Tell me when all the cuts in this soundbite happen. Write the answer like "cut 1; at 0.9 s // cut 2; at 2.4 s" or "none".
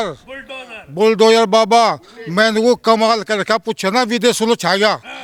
none